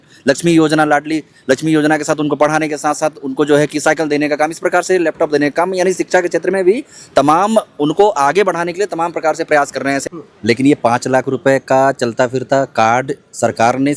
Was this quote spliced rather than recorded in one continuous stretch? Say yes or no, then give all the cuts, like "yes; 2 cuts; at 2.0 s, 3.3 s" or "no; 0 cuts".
yes; 1 cut; at 10.0 s